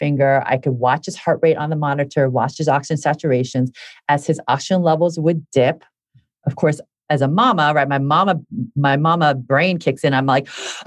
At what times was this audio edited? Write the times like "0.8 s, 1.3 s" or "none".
none